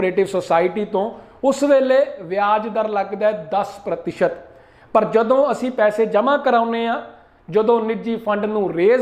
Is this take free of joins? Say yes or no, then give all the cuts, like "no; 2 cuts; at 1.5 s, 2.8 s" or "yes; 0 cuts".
yes; 0 cuts